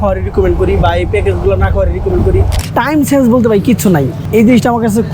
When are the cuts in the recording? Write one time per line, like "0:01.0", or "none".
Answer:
0:02.5
0:04.2

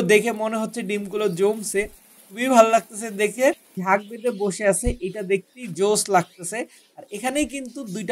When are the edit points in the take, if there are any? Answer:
0:03.8

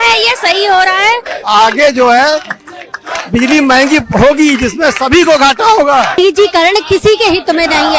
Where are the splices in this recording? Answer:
0:01.3
0:06.2

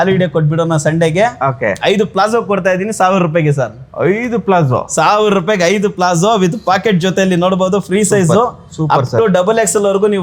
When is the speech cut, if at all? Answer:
none

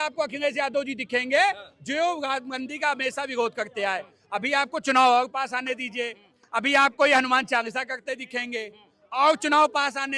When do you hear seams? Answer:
none

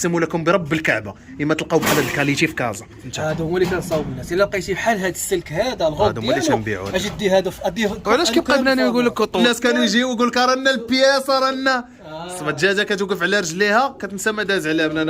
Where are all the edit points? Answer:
0:03.1
0:09.4

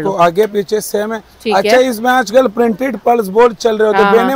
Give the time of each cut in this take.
none

